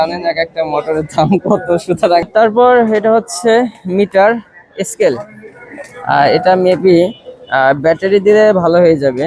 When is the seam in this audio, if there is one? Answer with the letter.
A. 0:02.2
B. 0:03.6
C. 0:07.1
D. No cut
A